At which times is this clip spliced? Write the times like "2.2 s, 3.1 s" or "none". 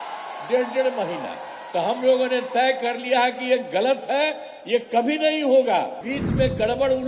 6.1 s